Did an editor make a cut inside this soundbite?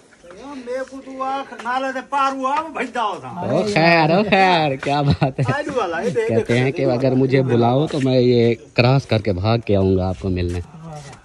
no; 0 cuts

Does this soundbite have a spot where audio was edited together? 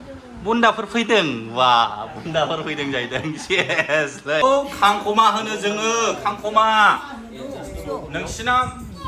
yes; 1 cut; at 4.4 s

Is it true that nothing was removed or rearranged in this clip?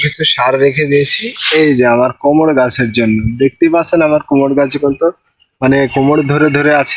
yes; 0 cuts

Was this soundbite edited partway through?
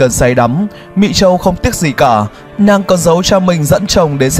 no; 0 cuts

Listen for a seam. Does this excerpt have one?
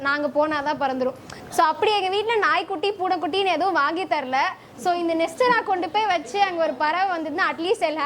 yes; 1 cut; at 1.3 s

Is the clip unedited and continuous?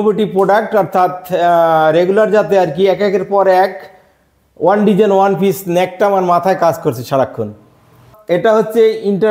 no; 1 cut; at 8.1 s

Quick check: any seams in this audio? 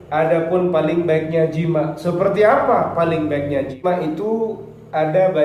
yes; 1 cut; at 3.8 s

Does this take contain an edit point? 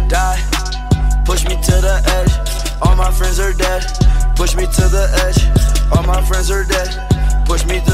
no; 0 cuts

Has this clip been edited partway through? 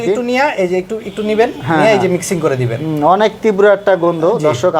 no; 0 cuts

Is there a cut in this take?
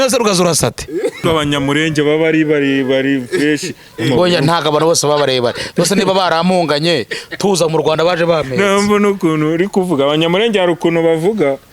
yes; 1 cut; at 1.2 s

